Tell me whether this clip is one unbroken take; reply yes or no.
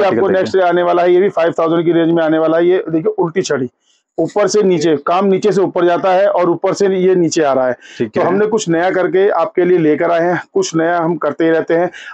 yes